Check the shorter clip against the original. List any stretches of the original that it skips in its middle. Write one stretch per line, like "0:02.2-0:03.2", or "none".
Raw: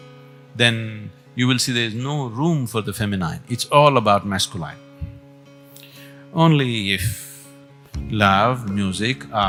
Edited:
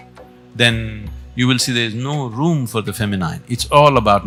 none